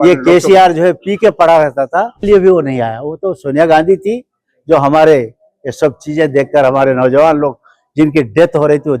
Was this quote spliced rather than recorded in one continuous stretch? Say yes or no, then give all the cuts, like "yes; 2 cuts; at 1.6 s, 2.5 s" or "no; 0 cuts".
yes; 1 cut; at 2.3 s